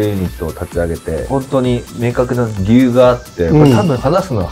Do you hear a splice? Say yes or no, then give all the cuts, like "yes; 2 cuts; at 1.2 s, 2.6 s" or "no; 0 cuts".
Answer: yes; 1 cut; at 1.2 s